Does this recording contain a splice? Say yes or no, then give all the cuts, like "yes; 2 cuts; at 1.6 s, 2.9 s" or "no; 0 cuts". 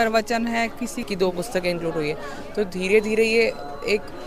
yes; 1 cut; at 1.1 s